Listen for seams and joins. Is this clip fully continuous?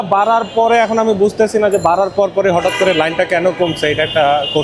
yes; 0 cuts

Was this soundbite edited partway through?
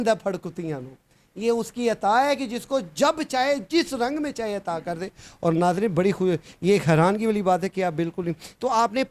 no; 0 cuts

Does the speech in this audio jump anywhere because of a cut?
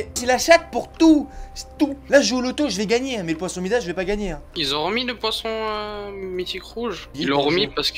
yes; 2 cuts; at 4.4 s, 7.1 s

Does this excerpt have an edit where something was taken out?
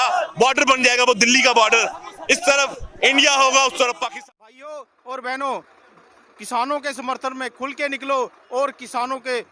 yes; 1 cut; at 4.0 s

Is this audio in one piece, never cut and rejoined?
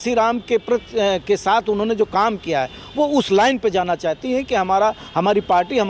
yes; 0 cuts

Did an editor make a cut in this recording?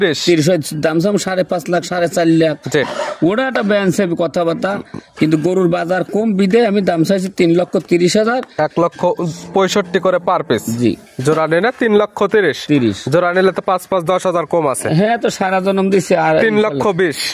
no; 0 cuts

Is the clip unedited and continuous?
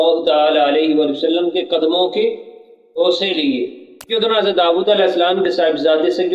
no; 1 cut; at 4.1 s

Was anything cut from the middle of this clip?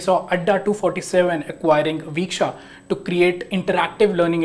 no; 0 cuts

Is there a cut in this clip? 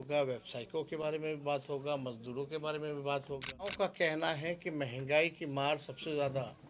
yes; 1 cut; at 3.7 s

